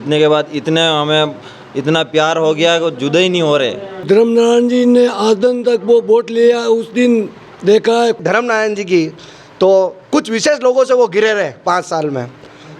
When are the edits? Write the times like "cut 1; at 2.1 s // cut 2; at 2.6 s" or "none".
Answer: cut 1; at 4.0 s // cut 2; at 8.2 s

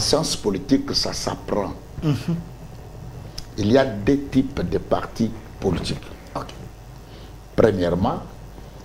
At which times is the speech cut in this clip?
none

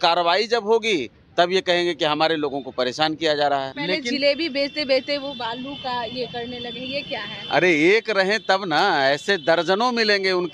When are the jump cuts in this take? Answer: cut 1; at 3.7 s

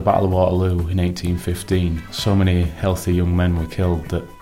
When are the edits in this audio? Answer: cut 1; at 2.1 s

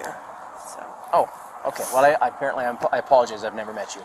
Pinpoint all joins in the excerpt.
none

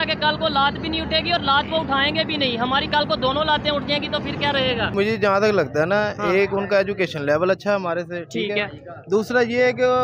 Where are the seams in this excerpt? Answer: cut 1; at 4.9 s

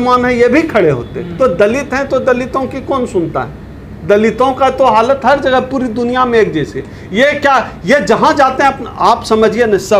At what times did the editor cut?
none

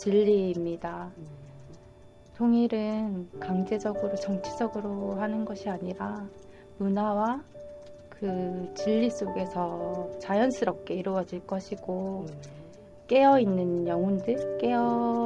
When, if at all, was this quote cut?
cut 1; at 12.9 s

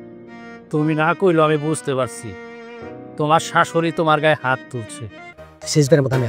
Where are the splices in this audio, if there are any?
cut 1; at 5.3 s

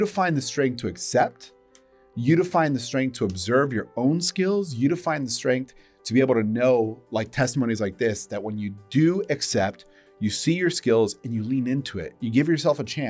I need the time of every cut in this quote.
none

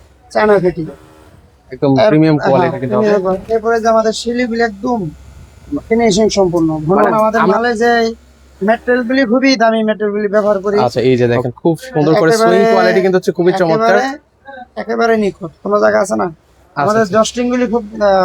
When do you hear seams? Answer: cut 1; at 7.1 s // cut 2; at 10.8 s

